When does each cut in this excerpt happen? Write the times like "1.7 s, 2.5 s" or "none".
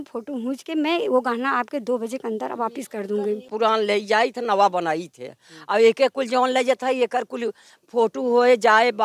3.4 s